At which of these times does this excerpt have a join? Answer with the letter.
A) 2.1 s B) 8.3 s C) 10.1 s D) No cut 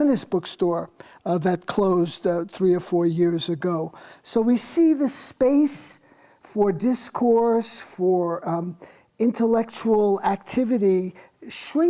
C